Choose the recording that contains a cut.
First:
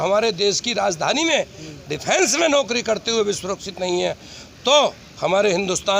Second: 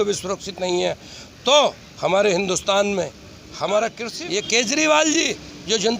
second; 1 cut; at 4.1 s

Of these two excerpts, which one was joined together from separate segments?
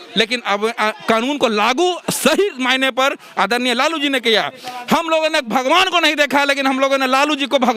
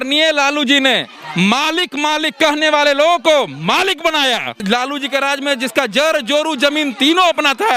second; 1 cut; at 4.6 s

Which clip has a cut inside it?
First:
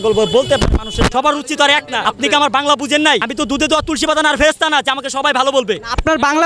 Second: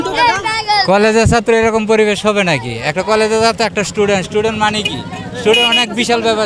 first; 3 cuts; at 1.1 s, 2.0 s, 3.3 s

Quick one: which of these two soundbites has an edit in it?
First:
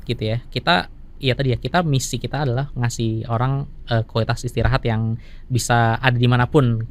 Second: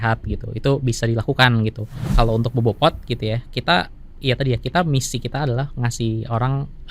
second; 1 cut; at 2.0 s

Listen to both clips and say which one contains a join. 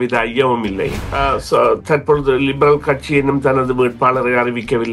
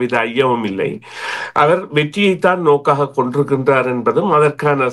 first; 1 cut; at 1.1 s

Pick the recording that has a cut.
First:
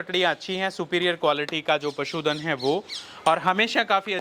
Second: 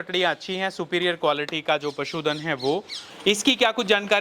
second; 1 cut; at 3.0 s

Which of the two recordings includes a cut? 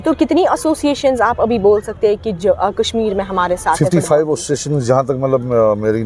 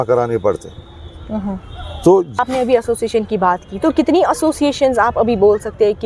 second; 1 cut; at 2.4 s

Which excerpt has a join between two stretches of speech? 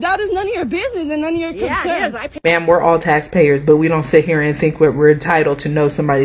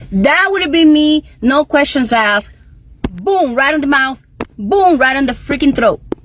first; 1 cut; at 2.4 s

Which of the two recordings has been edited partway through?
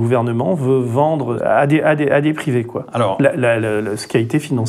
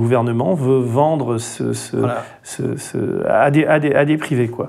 first; 1 cut; at 1.4 s

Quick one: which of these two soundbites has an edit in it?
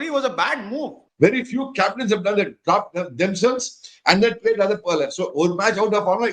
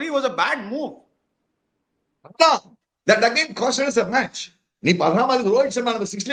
first; 1 cut; at 1.0 s

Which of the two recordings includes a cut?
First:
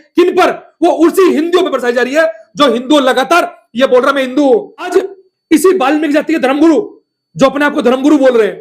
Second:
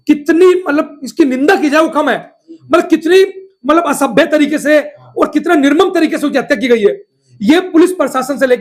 first; 1 cut; at 4.9 s

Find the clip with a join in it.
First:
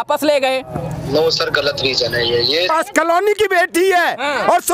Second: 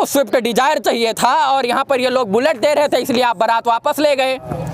first; 1 cut; at 2.7 s

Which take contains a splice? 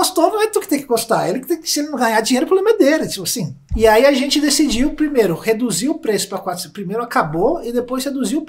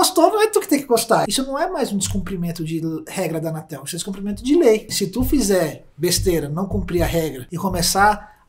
second; 3 cuts; at 1.2 s, 4.9 s, 7.4 s

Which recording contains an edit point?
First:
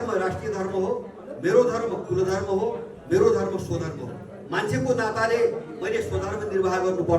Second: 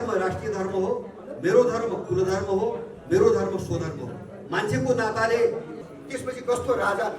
second; 1 cut; at 5.7 s

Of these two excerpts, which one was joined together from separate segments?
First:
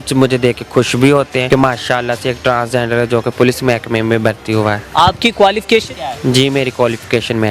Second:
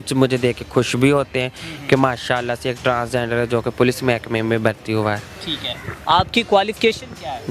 first; 3 cuts; at 1.4 s, 4.8 s, 6.0 s

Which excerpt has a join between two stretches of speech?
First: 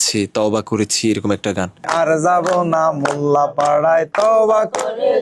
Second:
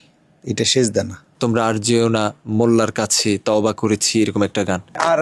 second; 1 cut; at 1.2 s

